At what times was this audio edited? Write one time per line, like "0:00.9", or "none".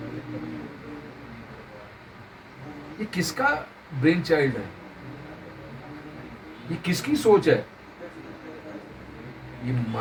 none